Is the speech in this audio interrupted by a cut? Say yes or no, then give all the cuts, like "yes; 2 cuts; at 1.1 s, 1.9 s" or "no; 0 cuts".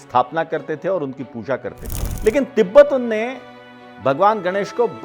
yes; 1 cut; at 2.0 s